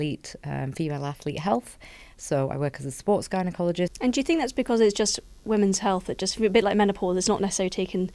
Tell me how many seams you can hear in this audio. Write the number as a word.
one